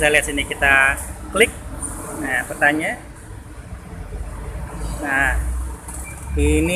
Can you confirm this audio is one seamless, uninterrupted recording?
yes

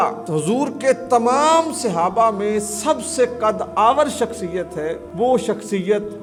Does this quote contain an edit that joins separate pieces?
no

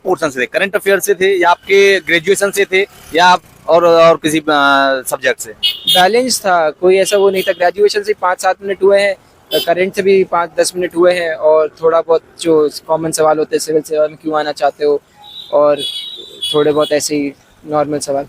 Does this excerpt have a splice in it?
no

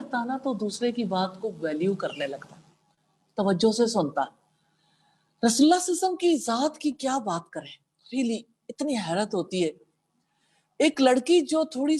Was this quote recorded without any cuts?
yes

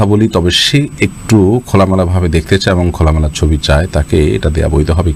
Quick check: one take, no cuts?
yes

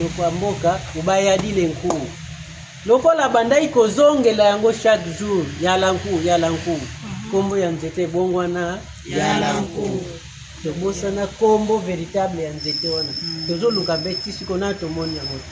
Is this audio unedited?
yes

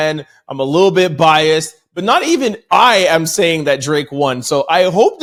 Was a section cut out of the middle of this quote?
no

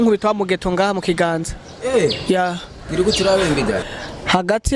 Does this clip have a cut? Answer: yes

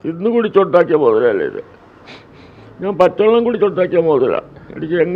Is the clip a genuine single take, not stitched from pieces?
yes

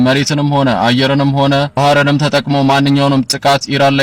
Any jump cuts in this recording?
no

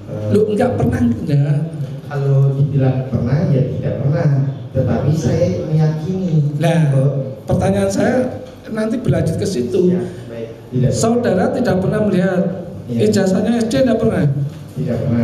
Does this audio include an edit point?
no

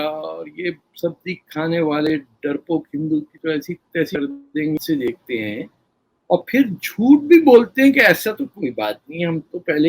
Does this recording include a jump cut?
yes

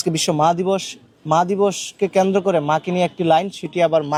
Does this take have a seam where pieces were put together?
no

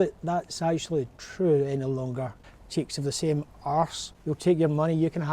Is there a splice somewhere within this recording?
yes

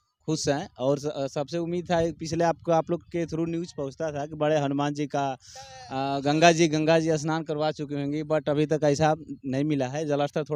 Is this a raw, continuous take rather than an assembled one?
yes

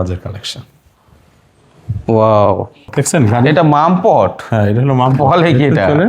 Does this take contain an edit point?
yes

